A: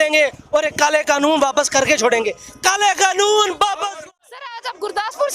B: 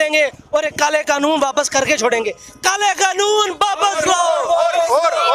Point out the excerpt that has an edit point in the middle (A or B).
A